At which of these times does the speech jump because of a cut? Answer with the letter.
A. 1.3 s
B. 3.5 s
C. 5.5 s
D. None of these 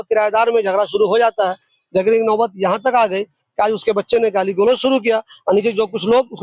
D